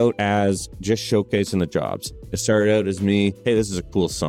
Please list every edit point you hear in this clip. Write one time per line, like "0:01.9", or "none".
0:03.4